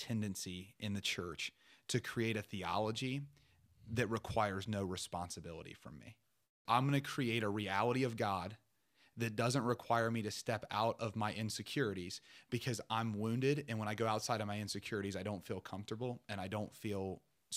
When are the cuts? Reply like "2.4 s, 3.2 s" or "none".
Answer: 6.6 s